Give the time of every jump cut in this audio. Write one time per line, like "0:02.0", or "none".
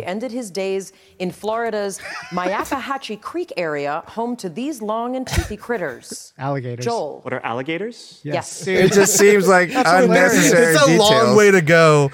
0:08.6

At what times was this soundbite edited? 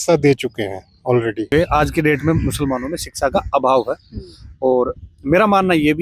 0:01.5

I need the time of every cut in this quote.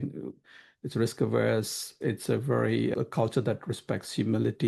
0:01.9
0:02.9

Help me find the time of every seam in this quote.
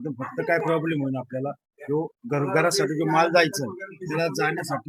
none

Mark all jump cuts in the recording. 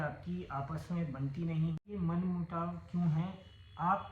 0:01.8

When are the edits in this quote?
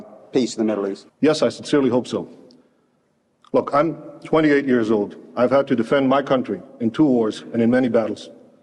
0:01.0

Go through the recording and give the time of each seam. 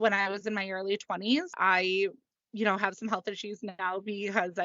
0:01.5

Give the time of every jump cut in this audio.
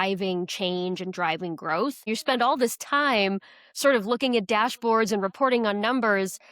0:02.1

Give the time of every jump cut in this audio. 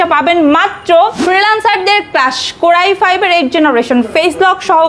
0:01.2

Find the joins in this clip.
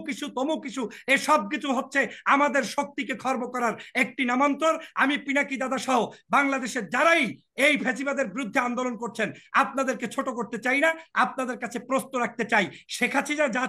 none

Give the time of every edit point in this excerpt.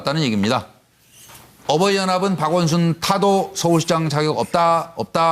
0:03.0

